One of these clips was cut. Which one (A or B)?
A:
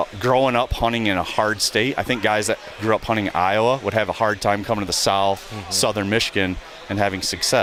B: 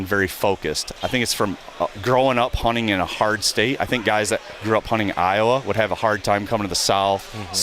B